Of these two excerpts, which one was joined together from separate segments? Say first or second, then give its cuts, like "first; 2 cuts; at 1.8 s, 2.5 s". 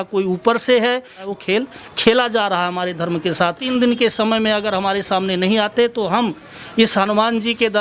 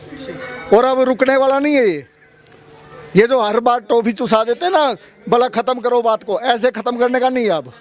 first; 2 cuts; at 1.3 s, 3.6 s